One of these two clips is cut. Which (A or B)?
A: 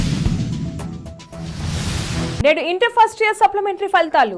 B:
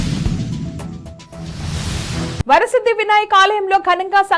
A